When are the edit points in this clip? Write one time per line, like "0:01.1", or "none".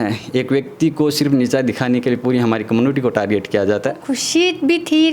0:04.1